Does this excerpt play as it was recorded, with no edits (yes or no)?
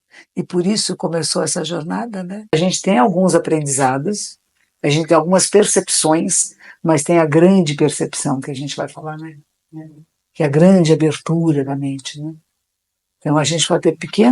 no